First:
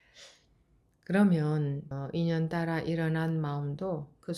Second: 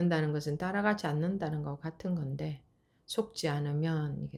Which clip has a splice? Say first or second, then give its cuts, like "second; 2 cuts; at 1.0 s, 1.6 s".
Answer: first; 1 cut; at 1.9 s